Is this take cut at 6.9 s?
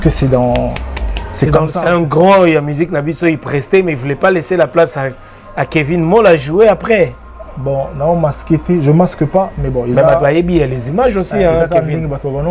no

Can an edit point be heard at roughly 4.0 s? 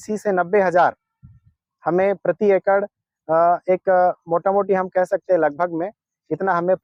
no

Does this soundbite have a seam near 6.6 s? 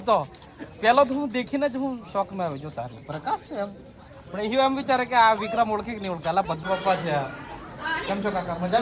yes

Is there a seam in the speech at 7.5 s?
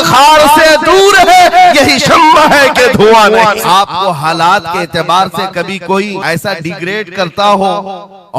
no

